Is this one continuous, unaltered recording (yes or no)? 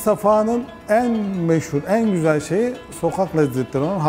yes